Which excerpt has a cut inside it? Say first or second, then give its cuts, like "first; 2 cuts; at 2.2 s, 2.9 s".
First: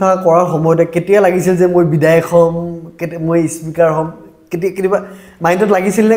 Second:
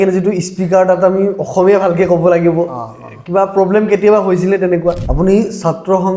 second; 1 cut; at 5.1 s